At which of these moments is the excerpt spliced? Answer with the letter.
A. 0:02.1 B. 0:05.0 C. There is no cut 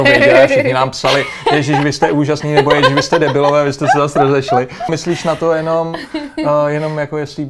B